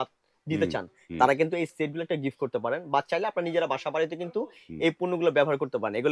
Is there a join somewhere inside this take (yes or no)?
no